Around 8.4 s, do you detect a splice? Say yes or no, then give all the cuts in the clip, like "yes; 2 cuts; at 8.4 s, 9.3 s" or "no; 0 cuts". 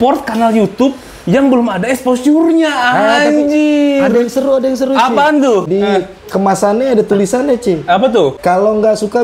yes; 2 cuts; at 5.7 s, 8.4 s